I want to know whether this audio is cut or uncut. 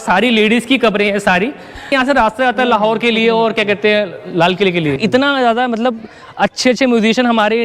cut